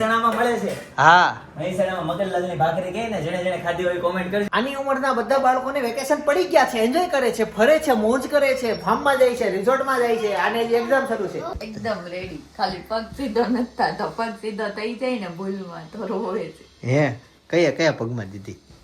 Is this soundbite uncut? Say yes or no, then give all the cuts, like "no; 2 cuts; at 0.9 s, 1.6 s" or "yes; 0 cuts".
no; 2 cuts; at 4.5 s, 11.4 s